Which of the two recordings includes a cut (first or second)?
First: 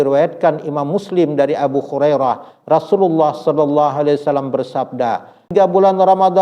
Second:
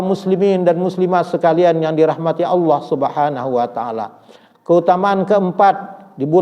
first